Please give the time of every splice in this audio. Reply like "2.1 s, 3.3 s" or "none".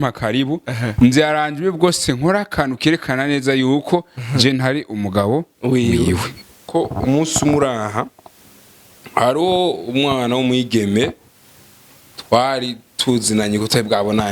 6.7 s

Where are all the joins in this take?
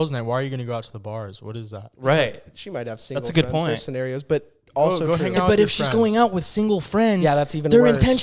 none

